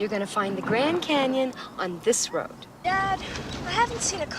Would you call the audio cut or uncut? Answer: cut